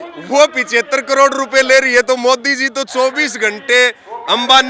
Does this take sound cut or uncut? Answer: uncut